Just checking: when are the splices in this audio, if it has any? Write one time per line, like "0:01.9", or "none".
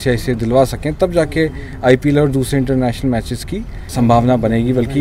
none